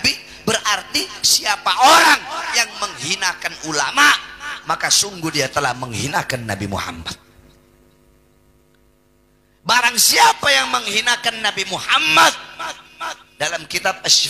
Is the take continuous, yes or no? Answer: yes